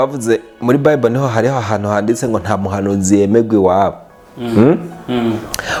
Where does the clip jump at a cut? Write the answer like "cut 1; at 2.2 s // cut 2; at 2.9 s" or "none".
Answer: none